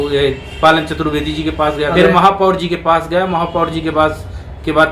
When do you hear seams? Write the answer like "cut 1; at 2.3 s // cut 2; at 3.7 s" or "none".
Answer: cut 1; at 1.9 s